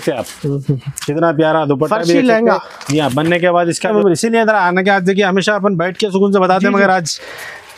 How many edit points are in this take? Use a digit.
1